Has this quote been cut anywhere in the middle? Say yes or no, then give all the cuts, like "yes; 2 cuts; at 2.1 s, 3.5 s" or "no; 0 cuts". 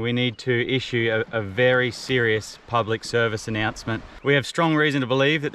yes; 1 cut; at 4.1 s